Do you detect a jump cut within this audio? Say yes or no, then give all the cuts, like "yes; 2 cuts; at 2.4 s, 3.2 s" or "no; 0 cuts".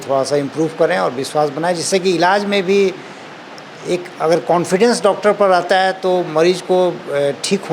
no; 0 cuts